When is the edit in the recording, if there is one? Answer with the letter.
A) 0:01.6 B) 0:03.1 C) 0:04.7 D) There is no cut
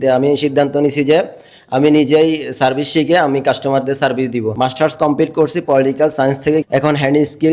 D